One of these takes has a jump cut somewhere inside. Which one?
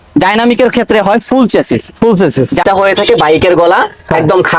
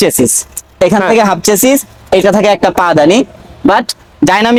first; 1 cut; at 2.6 s

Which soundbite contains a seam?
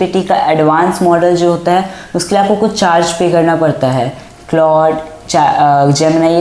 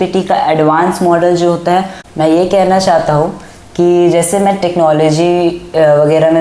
second; 1 cut; at 2.0 s

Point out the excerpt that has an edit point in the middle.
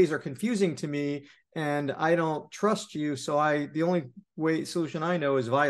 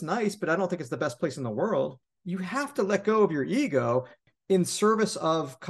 second; 2 cuts; at 2.0 s, 4.3 s

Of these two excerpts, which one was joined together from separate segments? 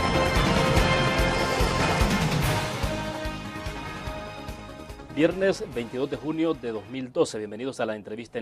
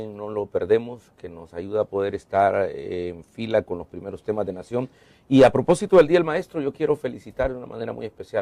second; 1 cut; at 3.2 s

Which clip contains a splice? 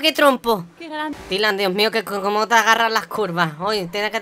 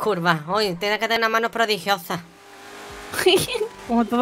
first; 1 cut; at 1.1 s

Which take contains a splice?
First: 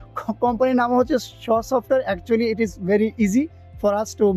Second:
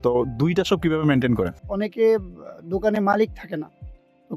second; 1 cut; at 1.6 s

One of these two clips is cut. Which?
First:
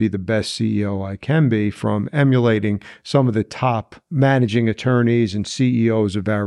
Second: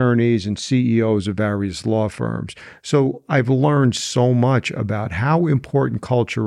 first; 1 cut; at 4.0 s

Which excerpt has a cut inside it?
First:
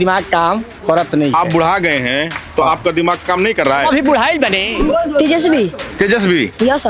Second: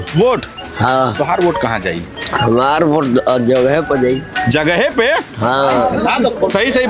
first; 1 cut; at 4.7 s

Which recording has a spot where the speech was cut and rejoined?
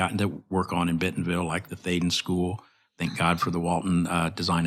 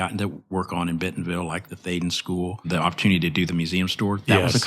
second; 1 cut; at 2.7 s

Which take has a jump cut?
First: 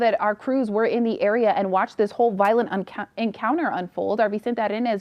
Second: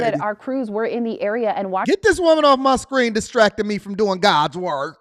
first; 1 cut; at 1.8 s

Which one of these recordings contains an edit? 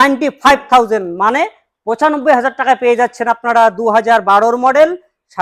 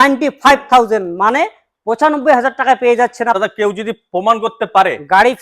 second; 1 cut; at 3.4 s

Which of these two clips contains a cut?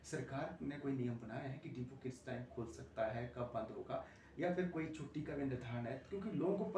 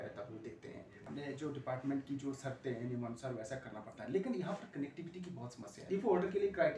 second; 2 cuts; at 1.1 s, 5.8 s

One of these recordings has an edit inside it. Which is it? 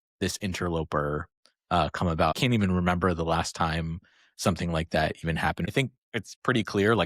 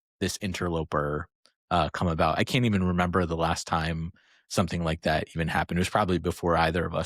first; 2 cuts; at 2.3 s, 5.7 s

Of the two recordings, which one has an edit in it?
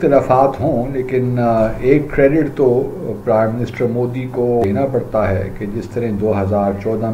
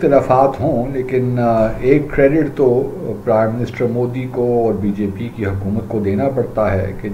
first; 1 cut; at 4.6 s

